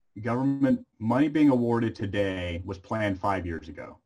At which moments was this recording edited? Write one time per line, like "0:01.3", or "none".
0:00.9